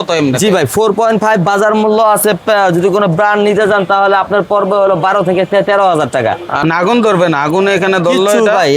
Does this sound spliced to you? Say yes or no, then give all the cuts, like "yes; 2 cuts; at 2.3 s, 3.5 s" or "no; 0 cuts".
yes; 1 cut; at 6.6 s